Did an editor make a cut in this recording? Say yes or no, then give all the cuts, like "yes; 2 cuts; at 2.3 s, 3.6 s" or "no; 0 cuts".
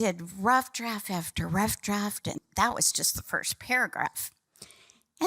yes; 1 cut; at 2.4 s